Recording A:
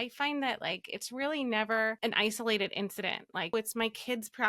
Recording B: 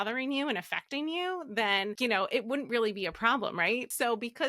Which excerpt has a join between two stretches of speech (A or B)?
A